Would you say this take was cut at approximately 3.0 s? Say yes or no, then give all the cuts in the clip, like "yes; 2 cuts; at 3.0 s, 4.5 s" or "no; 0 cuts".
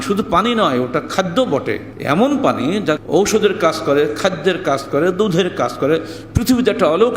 yes; 2 cuts; at 1.9 s, 3.0 s